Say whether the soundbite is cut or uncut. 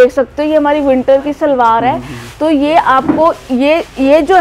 uncut